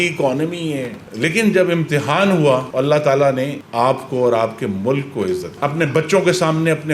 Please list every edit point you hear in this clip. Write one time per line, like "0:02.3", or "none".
0:01.1
0:05.5